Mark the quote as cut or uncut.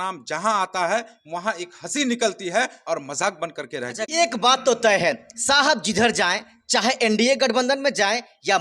cut